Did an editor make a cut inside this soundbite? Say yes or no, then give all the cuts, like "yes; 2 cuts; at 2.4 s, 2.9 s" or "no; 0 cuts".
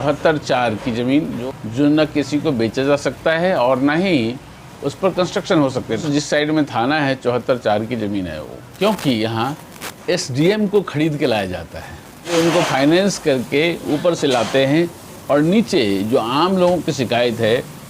yes; 4 cuts; at 1.4 s, 6.0 s, 8.7 s, 12.3 s